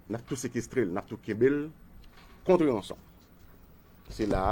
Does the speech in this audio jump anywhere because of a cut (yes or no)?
no